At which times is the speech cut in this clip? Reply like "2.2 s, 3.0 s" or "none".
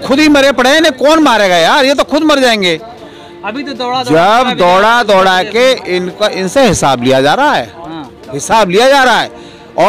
none